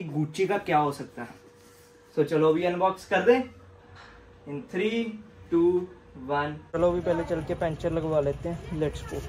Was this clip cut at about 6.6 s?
yes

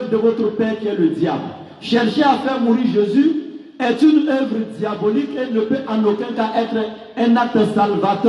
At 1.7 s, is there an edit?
no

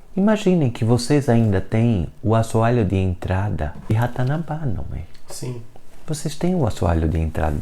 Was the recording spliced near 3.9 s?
yes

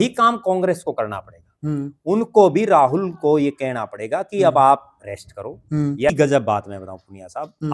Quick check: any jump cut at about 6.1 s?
yes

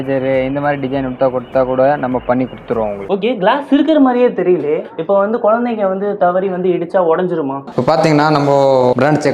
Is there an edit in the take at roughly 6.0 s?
no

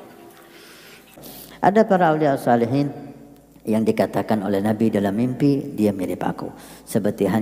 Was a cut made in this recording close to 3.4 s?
no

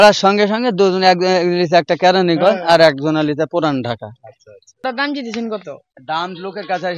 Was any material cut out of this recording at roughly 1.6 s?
no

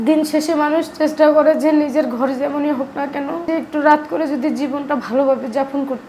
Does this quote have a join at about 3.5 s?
yes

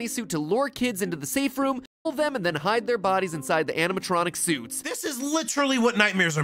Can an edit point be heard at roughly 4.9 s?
yes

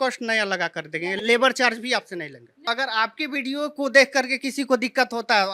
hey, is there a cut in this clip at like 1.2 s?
yes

